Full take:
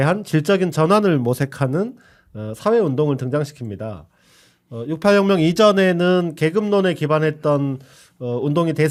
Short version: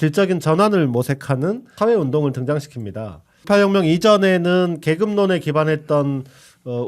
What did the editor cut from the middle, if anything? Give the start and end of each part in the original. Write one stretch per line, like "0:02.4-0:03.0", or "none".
0:02.0-0:02.5
0:04.3-0:05.0